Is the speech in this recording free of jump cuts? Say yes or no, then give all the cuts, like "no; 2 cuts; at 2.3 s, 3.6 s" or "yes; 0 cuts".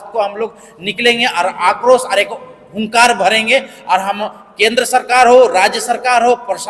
yes; 0 cuts